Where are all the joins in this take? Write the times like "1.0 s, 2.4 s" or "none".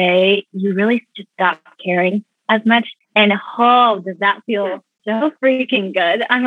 3.0 s, 4.9 s